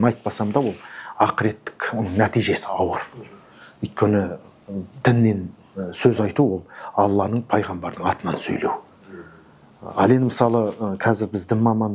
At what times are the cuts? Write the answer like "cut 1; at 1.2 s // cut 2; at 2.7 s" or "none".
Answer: none